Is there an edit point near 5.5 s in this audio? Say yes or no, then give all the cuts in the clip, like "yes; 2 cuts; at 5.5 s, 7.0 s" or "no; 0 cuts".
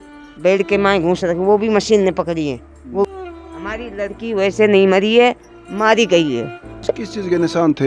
no; 2 cuts; at 3.1 s, 6.8 s